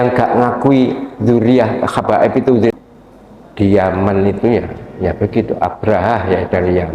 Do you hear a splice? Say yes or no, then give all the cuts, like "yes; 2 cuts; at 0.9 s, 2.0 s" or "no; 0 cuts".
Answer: yes; 1 cut; at 2.7 s